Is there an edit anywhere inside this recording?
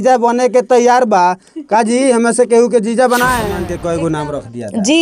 yes; 1 cut; at 3.7 s

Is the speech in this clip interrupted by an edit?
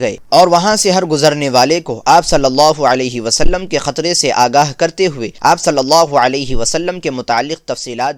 no; 0 cuts

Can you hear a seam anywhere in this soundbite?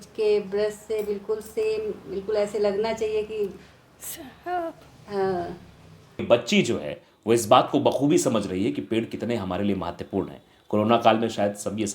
yes; 1 cut; at 6.2 s

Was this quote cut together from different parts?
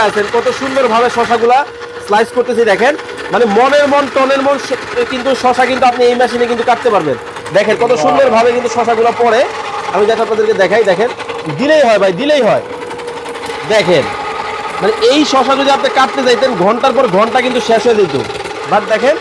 no; 0 cuts

